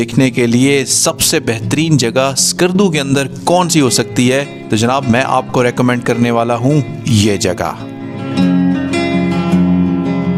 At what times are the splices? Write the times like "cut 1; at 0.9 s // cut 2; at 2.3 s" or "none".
none